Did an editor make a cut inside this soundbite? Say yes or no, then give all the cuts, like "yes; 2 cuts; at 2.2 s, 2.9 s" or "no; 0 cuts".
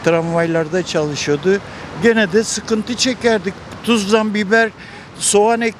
no; 0 cuts